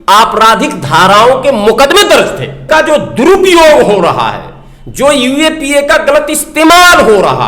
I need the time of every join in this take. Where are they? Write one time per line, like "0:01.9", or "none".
0:02.7